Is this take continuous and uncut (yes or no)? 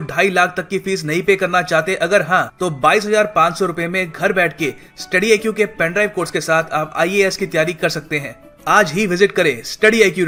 yes